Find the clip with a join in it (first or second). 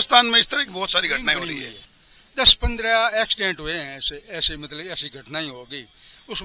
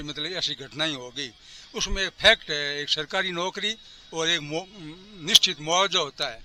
first